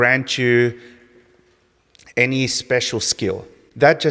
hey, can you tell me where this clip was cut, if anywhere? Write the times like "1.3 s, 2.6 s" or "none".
none